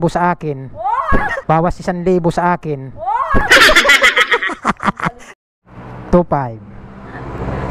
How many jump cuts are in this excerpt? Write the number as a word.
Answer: three